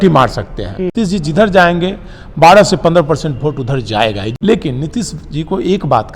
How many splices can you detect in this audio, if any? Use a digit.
2